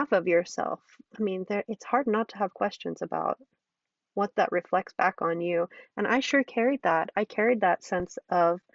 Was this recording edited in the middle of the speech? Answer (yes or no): no